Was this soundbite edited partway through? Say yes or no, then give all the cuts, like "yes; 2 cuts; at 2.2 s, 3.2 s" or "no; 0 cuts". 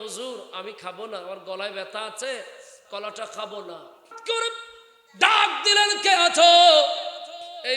yes; 1 cut; at 4.1 s